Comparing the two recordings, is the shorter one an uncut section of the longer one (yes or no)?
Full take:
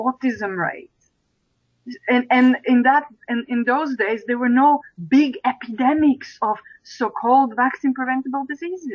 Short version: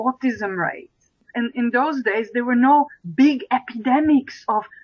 no